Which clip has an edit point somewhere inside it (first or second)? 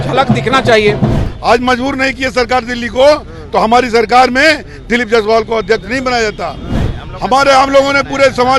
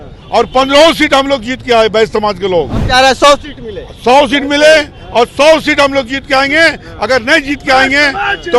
first